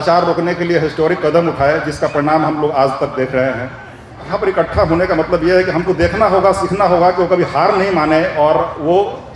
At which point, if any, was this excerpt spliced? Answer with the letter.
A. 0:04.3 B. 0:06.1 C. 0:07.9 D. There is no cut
A